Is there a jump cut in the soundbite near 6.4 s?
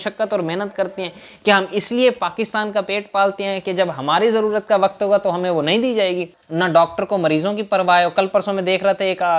yes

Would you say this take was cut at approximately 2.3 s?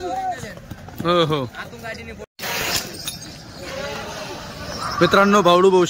yes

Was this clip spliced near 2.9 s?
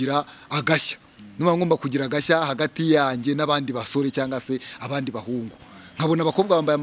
no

